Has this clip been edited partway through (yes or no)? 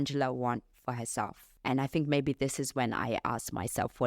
yes